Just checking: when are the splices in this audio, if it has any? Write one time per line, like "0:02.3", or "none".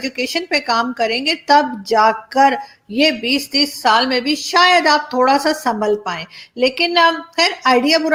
none